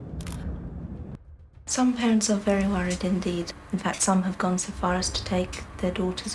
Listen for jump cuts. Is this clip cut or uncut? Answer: cut